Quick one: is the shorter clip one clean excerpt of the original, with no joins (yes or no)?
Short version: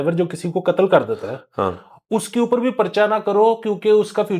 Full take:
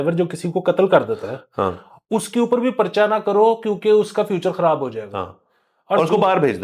yes